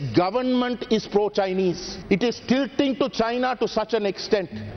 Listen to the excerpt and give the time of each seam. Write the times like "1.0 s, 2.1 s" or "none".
none